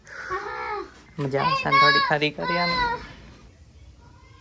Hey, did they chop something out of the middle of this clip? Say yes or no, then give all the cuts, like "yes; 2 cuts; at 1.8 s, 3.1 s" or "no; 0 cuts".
yes; 2 cuts; at 1.0 s, 3.5 s